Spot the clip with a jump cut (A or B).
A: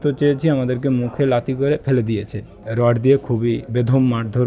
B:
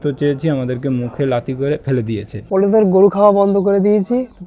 B